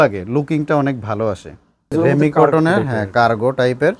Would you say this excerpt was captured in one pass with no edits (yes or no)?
no